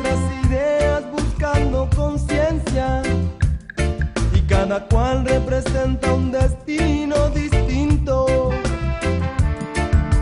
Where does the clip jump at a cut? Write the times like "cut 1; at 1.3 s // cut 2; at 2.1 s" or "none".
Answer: none